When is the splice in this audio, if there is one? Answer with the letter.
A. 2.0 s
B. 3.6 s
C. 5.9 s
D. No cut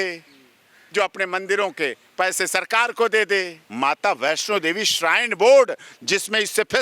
B